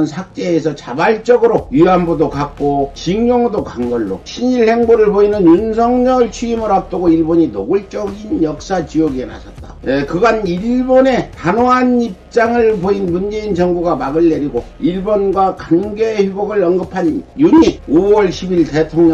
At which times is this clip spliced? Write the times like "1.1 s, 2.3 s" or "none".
1.7 s, 3.0 s, 4.2 s